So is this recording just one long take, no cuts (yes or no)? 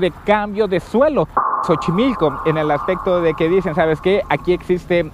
no